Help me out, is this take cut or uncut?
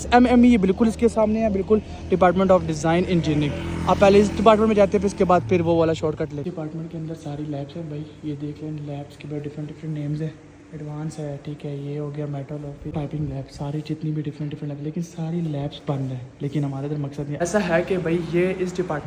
uncut